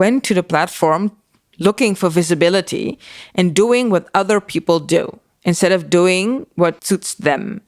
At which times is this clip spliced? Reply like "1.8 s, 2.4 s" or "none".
none

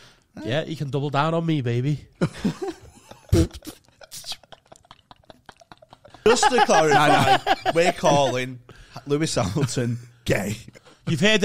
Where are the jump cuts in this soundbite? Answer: 6.2 s

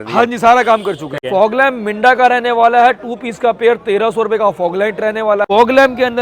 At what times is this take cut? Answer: 1.1 s, 5.4 s

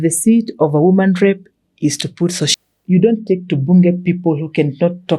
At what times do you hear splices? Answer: 2.5 s

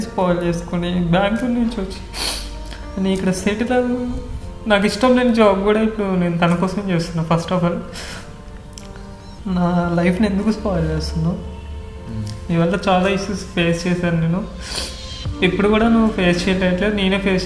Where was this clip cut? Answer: 9.3 s

